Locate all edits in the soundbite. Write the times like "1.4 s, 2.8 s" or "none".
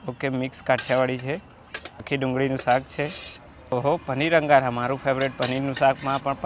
2.1 s, 3.6 s